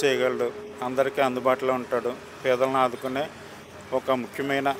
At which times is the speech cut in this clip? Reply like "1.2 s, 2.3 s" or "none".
none